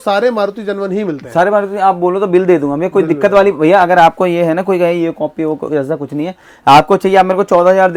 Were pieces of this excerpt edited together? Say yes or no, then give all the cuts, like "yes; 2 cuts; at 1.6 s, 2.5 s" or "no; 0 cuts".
no; 0 cuts